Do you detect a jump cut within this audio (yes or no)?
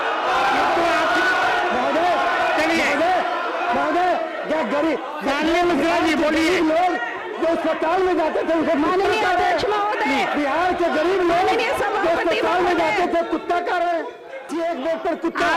yes